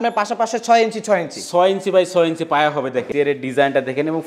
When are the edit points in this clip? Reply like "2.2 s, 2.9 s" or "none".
3.1 s